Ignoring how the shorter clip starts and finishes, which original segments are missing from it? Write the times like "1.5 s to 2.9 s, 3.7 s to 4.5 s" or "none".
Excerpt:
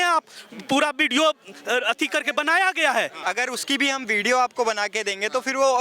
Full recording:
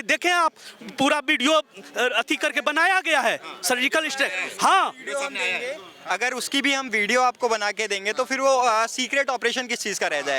3.4 s to 6.0 s